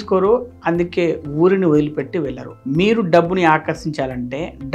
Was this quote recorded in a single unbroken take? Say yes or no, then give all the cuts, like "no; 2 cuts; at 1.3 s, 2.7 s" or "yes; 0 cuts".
yes; 0 cuts